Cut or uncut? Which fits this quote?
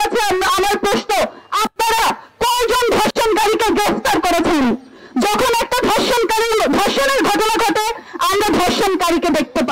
uncut